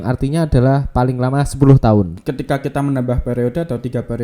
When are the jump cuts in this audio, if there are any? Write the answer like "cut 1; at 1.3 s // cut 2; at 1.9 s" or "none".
cut 1; at 2.2 s

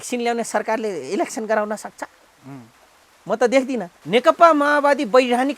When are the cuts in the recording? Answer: cut 1; at 3.9 s

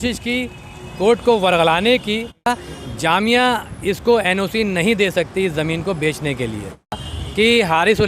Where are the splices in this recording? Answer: cut 1; at 2.5 s // cut 2; at 7.0 s

